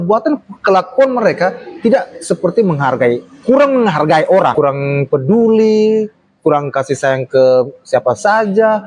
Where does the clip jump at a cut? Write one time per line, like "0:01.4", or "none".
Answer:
0:04.5